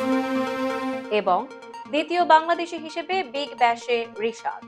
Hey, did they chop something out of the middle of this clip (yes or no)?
yes